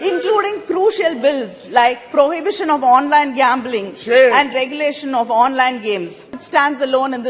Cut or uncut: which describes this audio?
cut